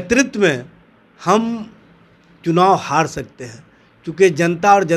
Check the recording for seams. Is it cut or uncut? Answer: uncut